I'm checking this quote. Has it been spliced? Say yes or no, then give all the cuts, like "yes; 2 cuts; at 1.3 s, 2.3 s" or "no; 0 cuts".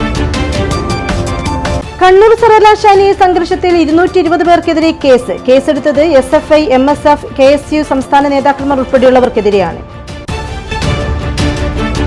no; 0 cuts